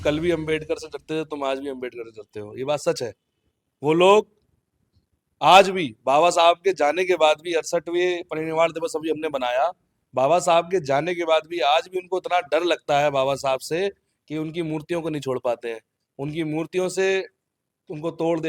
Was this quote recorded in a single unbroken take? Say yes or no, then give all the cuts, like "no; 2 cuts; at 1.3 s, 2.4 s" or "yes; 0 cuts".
yes; 0 cuts